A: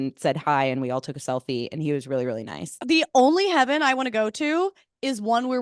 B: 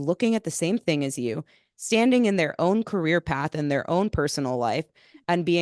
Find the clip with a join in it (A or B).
A